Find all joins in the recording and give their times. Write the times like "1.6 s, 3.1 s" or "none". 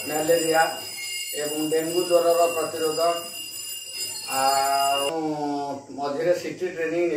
5.1 s